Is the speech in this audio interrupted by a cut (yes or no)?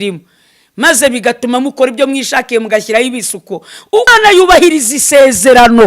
yes